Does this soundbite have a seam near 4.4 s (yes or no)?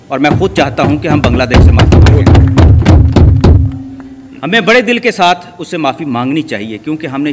no